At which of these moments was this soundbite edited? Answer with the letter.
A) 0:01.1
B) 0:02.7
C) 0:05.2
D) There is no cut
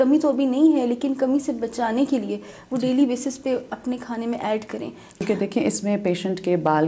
C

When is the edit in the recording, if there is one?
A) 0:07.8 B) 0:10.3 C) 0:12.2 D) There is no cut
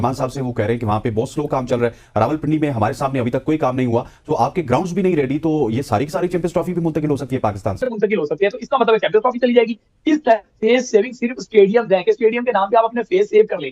A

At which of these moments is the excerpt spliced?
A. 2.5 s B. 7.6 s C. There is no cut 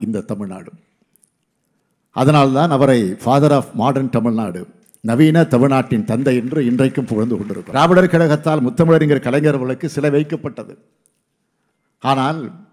B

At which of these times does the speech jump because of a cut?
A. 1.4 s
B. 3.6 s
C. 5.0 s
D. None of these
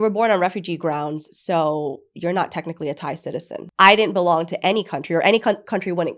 B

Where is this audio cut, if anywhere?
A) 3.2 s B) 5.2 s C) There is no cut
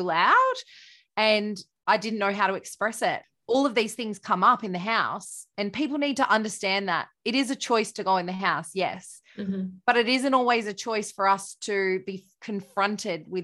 A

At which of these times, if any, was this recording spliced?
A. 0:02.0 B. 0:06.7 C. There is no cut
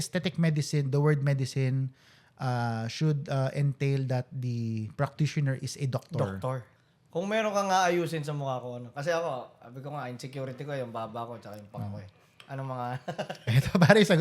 B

